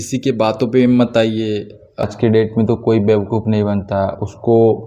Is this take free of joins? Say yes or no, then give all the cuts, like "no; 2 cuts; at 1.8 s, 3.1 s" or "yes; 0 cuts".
no; 1 cut; at 2.0 s